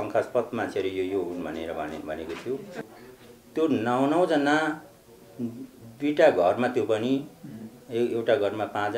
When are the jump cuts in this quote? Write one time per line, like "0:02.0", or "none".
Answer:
0:02.8